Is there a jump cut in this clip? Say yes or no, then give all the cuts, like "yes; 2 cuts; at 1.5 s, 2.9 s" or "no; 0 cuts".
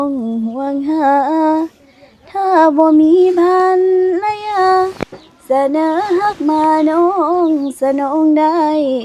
no; 0 cuts